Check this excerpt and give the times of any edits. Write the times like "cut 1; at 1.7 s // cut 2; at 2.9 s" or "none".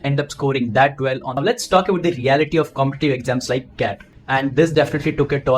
cut 1; at 1.4 s // cut 2; at 4.1 s